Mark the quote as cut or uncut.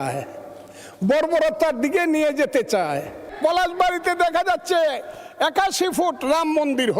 cut